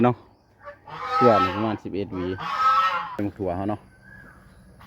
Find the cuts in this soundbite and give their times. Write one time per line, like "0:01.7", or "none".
0:03.2